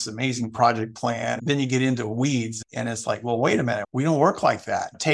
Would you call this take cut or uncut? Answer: cut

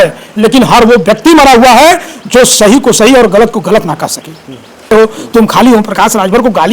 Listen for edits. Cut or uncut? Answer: cut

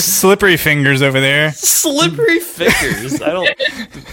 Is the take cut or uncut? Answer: uncut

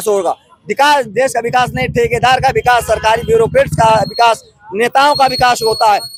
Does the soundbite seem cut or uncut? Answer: uncut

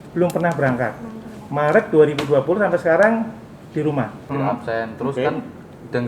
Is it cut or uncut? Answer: cut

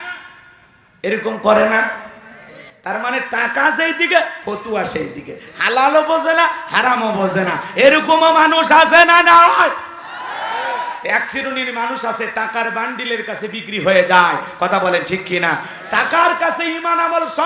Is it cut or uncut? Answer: uncut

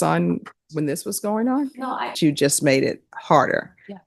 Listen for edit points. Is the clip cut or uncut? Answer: cut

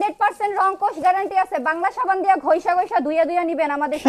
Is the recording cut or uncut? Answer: uncut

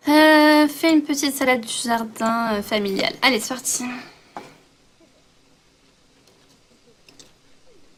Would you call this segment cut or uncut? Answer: uncut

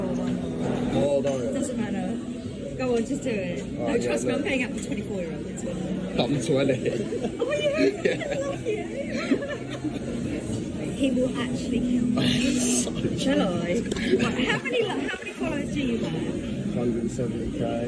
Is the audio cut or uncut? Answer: uncut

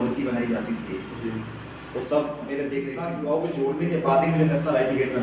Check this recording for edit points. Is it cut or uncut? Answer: cut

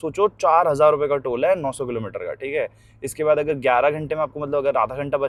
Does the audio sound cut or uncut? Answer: uncut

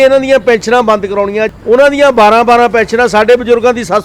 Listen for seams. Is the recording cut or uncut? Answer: cut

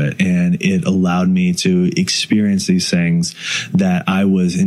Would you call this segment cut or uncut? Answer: uncut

